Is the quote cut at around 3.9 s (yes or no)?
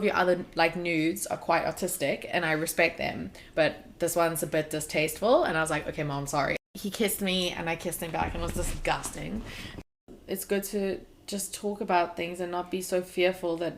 no